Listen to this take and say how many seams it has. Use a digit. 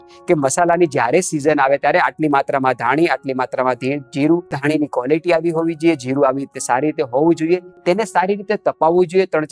2